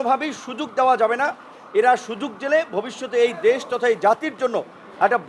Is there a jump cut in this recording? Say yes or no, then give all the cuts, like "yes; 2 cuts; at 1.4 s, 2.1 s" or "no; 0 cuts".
no; 0 cuts